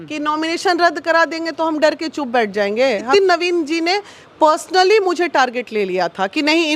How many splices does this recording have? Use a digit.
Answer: 1